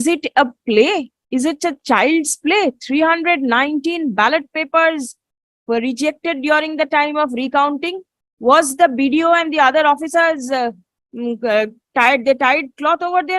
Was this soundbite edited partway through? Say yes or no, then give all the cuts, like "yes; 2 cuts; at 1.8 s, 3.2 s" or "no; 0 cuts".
no; 0 cuts